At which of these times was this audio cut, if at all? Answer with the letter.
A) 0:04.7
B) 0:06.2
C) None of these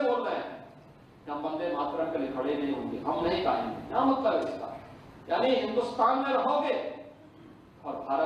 C